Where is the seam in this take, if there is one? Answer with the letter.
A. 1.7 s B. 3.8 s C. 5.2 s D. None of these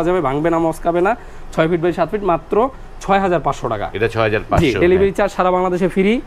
D